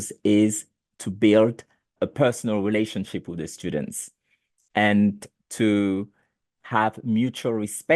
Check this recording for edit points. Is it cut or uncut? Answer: cut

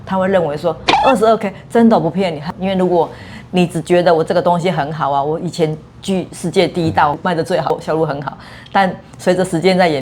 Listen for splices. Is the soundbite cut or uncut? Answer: cut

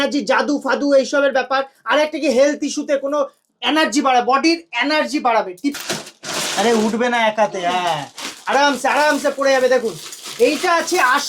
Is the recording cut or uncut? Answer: cut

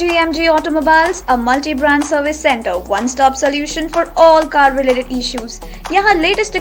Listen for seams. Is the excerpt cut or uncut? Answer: uncut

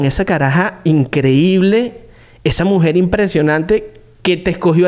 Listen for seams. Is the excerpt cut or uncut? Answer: uncut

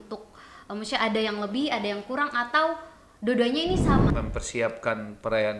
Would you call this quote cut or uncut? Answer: cut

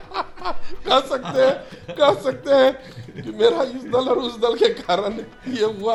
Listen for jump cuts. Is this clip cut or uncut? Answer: uncut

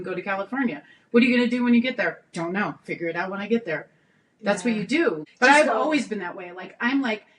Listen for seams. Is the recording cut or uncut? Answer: cut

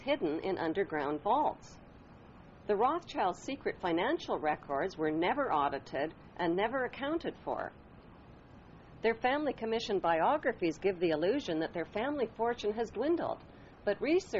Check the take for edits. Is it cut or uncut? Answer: uncut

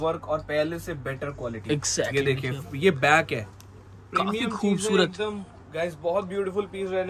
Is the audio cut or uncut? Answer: cut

